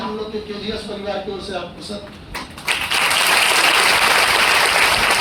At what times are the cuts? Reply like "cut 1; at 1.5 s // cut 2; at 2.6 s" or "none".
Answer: none